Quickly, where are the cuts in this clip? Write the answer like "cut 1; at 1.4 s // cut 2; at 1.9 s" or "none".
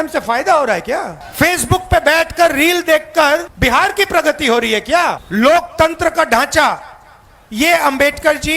cut 1; at 1.2 s // cut 2; at 3.5 s // cut 3; at 5.2 s